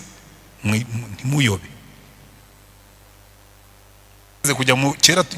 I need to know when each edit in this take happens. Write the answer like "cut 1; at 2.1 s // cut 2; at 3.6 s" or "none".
cut 1; at 4.5 s

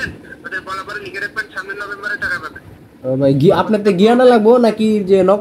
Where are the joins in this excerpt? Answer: none

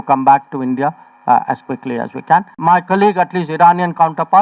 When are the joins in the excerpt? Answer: cut 1; at 2.5 s

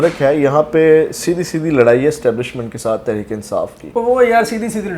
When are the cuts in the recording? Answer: none

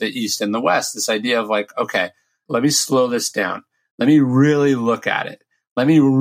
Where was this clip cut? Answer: cut 1; at 2.4 s

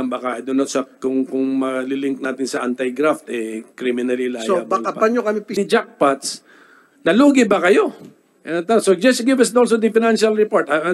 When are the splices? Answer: cut 1; at 5.5 s

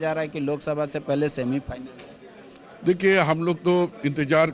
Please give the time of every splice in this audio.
none

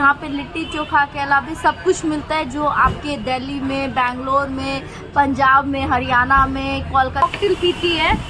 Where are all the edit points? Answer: cut 1; at 7.2 s

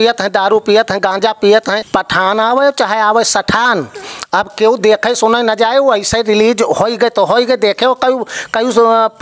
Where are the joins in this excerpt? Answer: cut 1; at 1.8 s

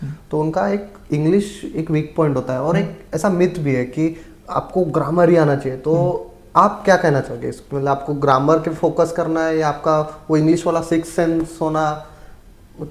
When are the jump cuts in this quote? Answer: none

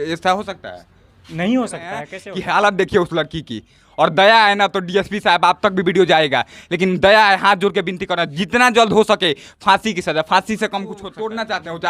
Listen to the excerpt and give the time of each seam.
cut 1; at 2.2 s // cut 2; at 11.1 s

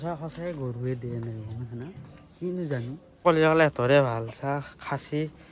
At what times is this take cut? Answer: cut 1; at 3.1 s

